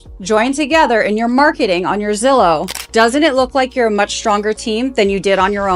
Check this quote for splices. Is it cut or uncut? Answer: uncut